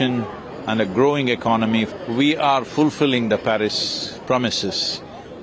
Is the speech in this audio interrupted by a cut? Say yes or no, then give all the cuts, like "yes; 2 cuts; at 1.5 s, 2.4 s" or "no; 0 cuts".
yes; 1 cut; at 1.9 s